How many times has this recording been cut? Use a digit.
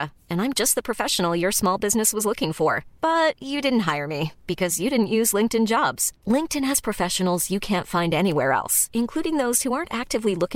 0